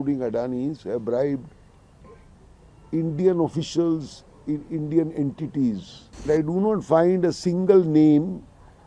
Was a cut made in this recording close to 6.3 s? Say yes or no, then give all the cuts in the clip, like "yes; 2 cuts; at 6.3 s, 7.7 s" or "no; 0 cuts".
yes; 1 cut; at 6.3 s